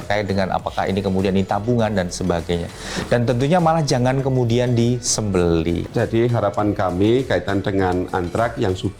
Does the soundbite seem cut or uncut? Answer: cut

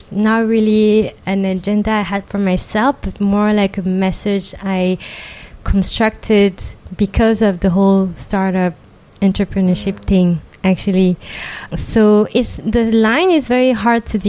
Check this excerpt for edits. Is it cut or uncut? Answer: cut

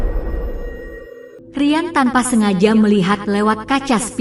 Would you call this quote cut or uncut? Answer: cut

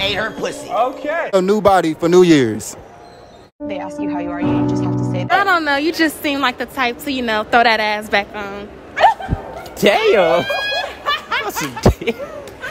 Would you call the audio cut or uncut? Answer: cut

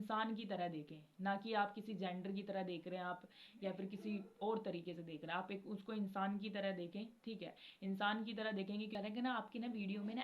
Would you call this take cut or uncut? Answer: cut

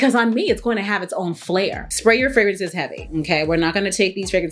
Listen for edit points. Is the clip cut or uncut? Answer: cut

